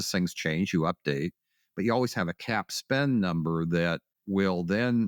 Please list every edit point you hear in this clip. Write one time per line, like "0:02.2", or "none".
0:04.1